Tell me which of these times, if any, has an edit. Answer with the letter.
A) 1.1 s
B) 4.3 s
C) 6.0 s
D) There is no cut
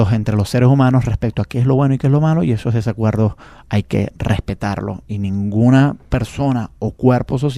A